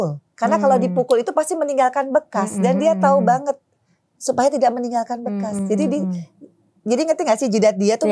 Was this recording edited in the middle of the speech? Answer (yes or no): no